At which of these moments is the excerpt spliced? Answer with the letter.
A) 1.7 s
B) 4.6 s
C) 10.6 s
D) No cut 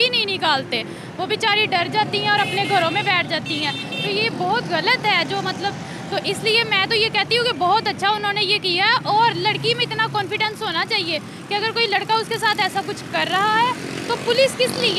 D